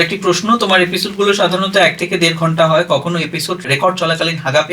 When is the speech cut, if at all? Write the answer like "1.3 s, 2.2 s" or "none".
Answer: 3.7 s